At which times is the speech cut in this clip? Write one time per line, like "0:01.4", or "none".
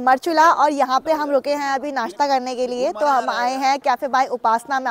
none